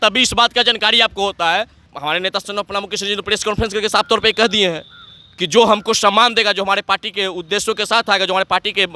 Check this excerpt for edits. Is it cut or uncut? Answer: cut